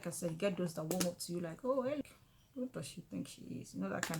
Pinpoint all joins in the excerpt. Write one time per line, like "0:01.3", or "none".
0:02.0